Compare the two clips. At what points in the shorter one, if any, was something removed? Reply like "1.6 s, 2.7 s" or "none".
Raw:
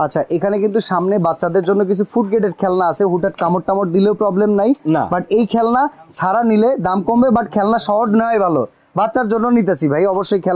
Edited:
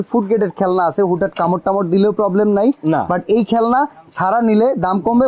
none